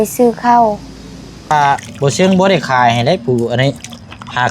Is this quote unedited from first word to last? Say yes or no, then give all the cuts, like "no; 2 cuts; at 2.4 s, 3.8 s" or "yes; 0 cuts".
no; 1 cut; at 1.5 s